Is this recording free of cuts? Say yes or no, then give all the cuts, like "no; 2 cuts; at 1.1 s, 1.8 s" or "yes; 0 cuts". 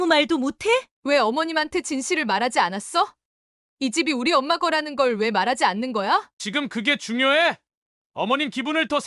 no; 2 cuts; at 0.9 s, 6.3 s